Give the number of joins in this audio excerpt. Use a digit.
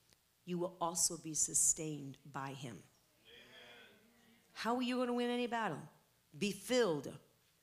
0